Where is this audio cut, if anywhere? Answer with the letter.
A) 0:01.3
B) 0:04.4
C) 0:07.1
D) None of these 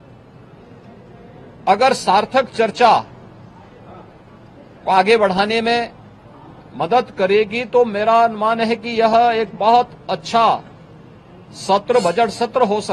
D